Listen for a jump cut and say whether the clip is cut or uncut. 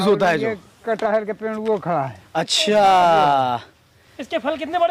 uncut